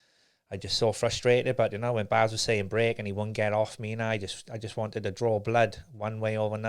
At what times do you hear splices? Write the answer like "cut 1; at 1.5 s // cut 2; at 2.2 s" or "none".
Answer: none